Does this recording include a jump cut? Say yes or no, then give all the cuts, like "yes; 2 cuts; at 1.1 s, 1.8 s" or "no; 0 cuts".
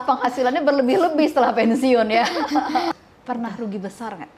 yes; 1 cut; at 2.9 s